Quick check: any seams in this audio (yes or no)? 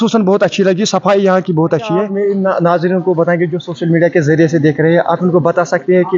yes